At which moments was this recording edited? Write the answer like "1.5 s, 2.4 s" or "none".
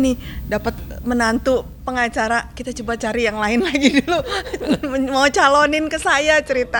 none